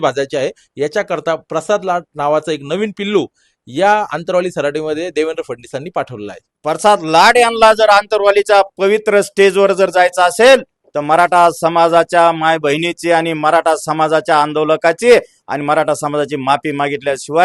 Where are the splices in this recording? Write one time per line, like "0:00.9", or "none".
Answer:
0:06.5